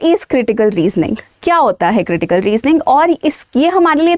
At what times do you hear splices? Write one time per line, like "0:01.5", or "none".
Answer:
none